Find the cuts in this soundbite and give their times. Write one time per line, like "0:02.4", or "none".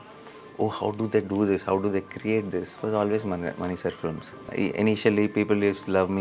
0:04.5

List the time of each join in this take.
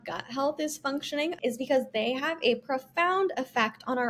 0:01.4

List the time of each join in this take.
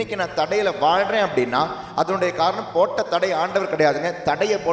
none

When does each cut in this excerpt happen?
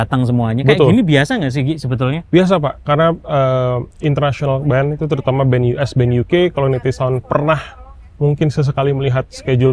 none

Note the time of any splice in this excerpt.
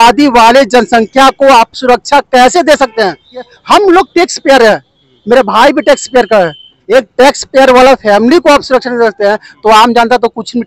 0:03.6
0:06.8

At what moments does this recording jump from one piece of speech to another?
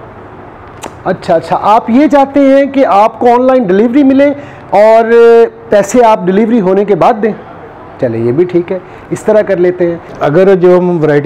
0:10.1

